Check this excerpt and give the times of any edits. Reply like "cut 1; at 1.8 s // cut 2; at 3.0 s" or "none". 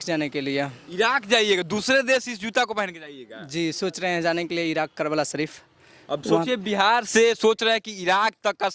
none

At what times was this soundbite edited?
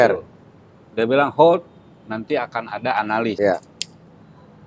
cut 1; at 3.4 s

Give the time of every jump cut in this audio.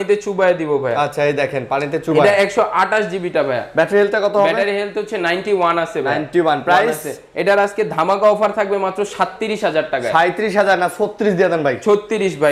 none

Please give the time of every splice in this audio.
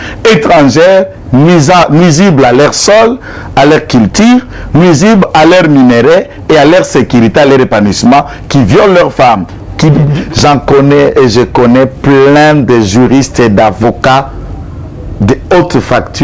cut 1; at 10.2 s

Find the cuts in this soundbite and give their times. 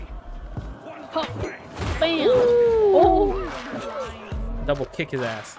none

